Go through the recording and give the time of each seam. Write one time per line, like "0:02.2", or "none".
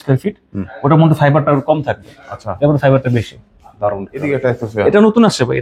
0:04.2